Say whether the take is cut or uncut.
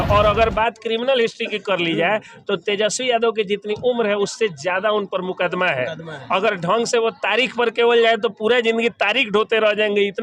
uncut